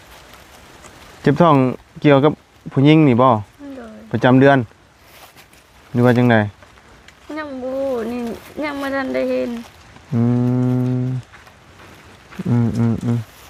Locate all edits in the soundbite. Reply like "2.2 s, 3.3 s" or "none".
none